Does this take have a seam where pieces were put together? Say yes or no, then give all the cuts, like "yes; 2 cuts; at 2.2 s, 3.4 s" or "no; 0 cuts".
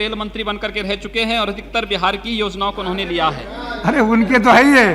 no; 0 cuts